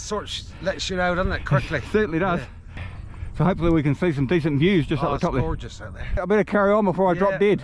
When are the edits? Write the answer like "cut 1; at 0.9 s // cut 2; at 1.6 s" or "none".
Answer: cut 1; at 2.9 s // cut 2; at 6.2 s